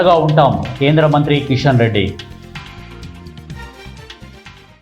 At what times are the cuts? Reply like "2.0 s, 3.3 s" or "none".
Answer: 2.2 s

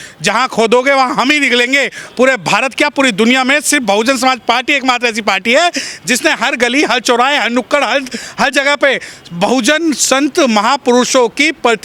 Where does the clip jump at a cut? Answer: none

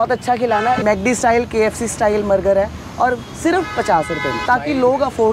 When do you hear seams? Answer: 0.8 s, 4.4 s

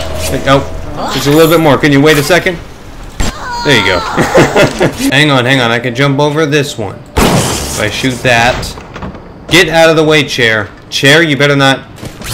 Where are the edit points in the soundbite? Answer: 5.1 s

